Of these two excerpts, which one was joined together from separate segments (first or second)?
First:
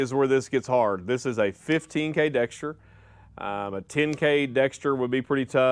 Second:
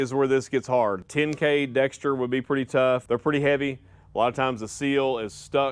second